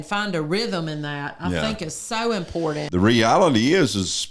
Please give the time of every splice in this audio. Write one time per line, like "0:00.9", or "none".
0:02.8